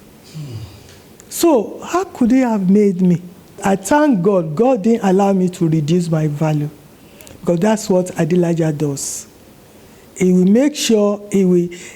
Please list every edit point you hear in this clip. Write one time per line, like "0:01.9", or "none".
0:03.6